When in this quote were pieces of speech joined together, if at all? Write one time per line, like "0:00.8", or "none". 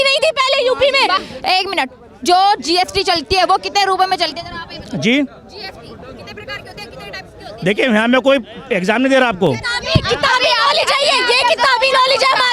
0:01.2